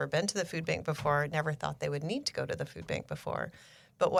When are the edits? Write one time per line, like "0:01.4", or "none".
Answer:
none

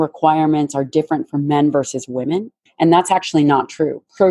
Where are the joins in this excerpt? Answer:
0:02.6

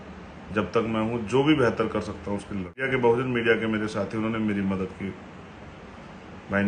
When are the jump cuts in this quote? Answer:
0:02.9

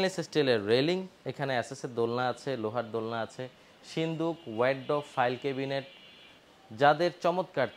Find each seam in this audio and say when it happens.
0:01.2

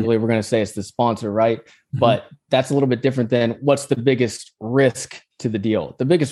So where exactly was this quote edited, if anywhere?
none

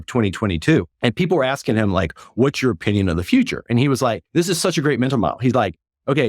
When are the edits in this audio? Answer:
0:00.9
0:04.2

